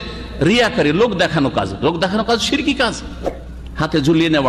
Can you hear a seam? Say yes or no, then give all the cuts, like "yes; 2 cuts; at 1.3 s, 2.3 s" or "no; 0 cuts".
no; 0 cuts